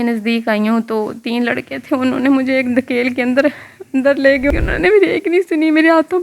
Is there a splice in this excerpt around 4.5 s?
yes; 1 cut; at 4.5 s

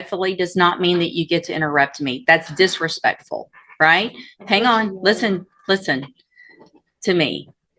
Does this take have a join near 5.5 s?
no; 0 cuts

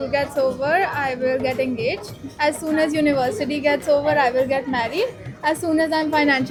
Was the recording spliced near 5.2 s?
no; 0 cuts

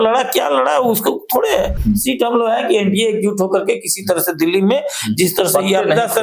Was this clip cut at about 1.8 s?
yes; 1 cut; at 1.8 s

